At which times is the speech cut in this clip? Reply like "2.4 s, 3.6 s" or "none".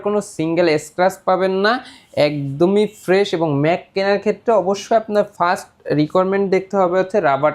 none